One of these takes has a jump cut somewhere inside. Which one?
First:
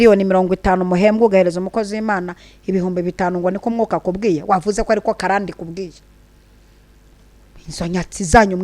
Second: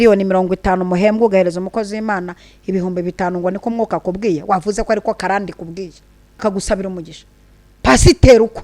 second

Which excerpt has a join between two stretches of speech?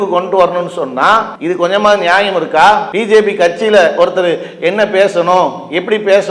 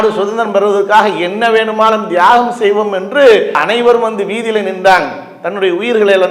first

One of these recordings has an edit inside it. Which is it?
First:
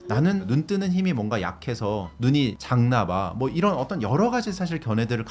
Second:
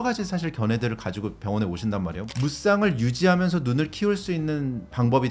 first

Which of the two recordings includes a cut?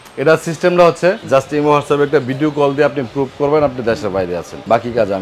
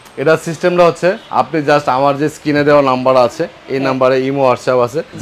first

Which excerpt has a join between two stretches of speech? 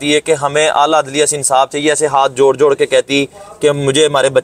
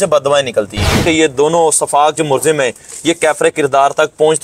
second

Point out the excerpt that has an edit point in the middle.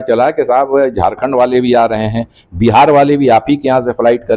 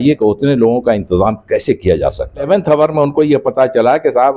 second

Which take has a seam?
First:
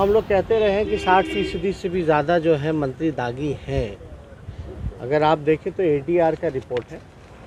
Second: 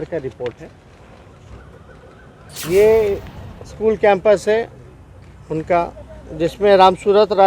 second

